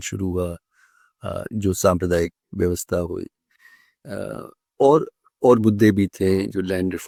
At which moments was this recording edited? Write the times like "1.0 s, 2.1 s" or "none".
none